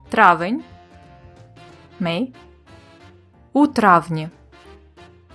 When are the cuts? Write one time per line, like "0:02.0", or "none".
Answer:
0:04.4